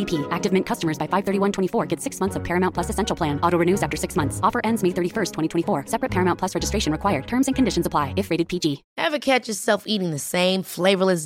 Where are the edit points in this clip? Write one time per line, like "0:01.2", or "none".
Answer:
0:08.9